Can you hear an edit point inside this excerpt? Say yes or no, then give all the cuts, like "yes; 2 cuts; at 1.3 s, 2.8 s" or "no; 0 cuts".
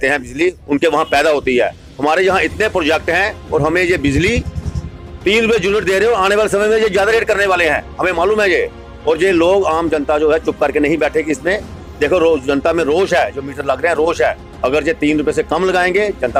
no; 0 cuts